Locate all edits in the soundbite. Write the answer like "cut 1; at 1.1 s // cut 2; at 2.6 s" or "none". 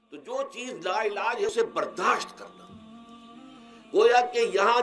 cut 1; at 1.5 s